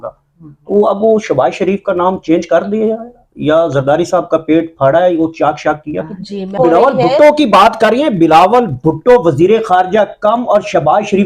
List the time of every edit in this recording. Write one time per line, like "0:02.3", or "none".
0:06.5

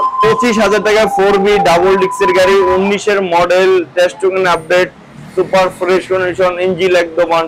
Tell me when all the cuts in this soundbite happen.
none

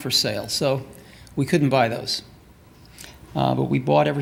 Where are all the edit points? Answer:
none

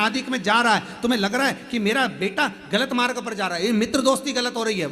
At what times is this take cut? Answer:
0:03.3

